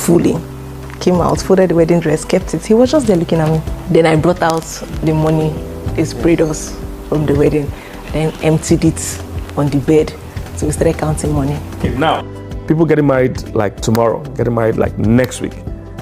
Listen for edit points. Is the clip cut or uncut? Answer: cut